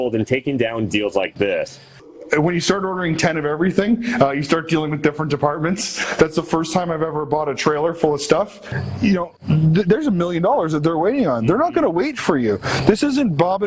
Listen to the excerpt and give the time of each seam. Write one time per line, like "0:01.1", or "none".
0:02.1
0:06.0
0:08.6

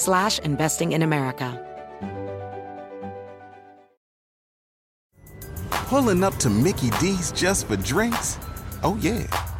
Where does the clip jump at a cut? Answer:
0:01.5

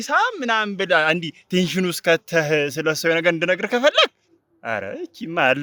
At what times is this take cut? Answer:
none

